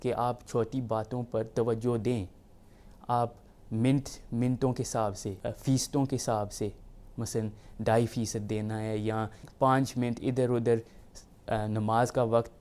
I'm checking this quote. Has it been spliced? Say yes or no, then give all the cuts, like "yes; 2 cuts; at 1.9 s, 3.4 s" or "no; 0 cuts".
no; 0 cuts